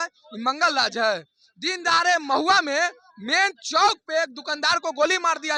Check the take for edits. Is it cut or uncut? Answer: uncut